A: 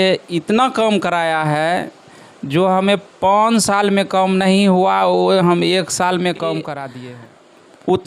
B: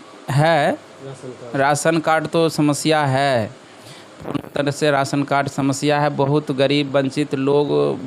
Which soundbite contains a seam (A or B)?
A